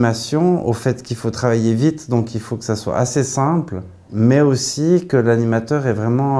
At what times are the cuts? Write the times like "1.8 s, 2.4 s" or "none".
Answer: 4.0 s

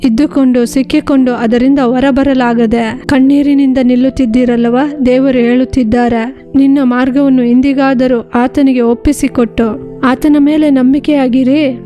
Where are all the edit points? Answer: 3.0 s

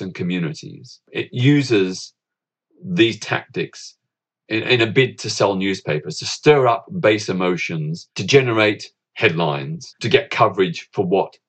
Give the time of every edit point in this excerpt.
8.2 s, 9.0 s, 10.0 s

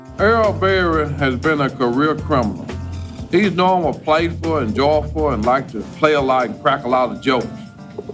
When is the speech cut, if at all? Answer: none

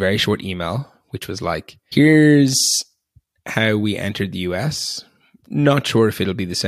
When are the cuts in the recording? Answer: 1.8 s

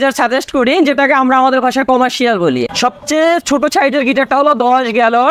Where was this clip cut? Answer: 2.6 s

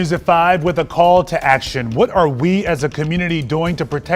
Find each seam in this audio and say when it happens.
none

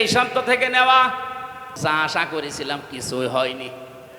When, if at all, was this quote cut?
1.7 s

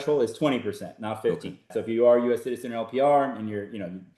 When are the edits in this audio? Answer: 1.7 s

